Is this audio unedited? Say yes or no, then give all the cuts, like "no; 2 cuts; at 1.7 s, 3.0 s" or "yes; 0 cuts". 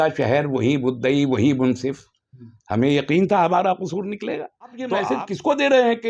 no; 1 cut; at 5.0 s